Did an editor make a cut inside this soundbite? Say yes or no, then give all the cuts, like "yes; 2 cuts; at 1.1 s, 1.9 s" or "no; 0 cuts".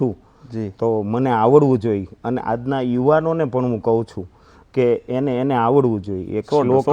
no; 0 cuts